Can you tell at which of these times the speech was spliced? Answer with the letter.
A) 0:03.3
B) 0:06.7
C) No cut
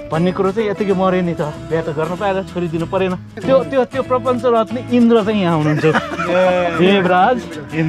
A